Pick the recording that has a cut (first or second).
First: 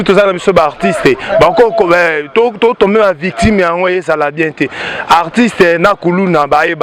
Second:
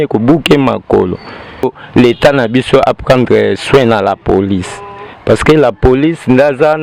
second